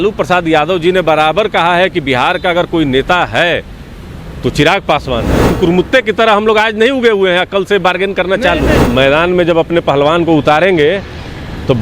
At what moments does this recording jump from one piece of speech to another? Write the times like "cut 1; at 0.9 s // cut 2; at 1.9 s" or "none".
cut 1; at 5.5 s // cut 2; at 8.8 s